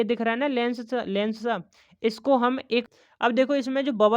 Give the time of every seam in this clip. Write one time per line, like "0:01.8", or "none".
0:02.9